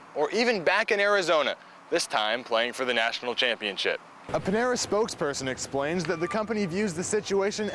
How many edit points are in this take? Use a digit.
1